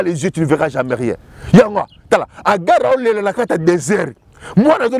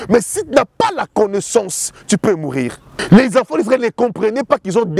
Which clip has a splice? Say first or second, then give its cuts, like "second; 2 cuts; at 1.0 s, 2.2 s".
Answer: second; 1 cut; at 2.9 s